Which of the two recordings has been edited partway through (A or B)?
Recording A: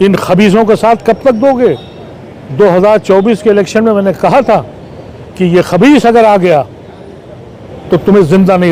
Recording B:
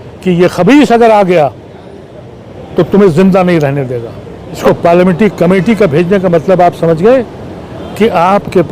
B